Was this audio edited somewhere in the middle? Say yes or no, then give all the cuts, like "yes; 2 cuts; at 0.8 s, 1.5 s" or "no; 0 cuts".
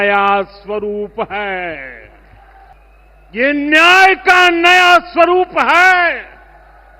yes; 1 cut; at 2.7 s